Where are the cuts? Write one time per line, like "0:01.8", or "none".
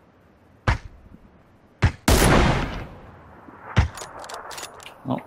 none